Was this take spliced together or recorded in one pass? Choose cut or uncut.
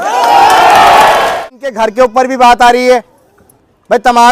cut